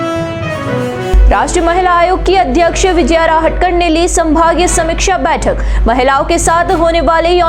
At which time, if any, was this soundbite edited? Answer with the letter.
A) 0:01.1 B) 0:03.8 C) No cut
A